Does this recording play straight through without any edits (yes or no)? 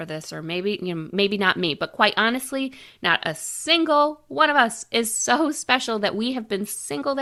yes